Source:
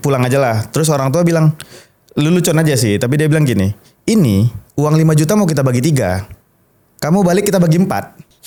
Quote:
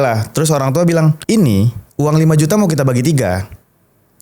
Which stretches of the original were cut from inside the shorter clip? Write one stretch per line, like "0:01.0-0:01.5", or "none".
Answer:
0:01.6-0:04.0